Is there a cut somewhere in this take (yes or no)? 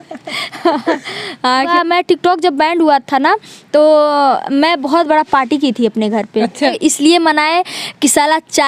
yes